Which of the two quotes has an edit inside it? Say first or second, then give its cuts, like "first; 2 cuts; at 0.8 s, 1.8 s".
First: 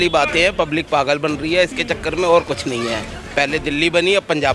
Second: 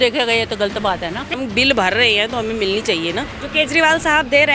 second; 2 cuts; at 1.3 s, 3.4 s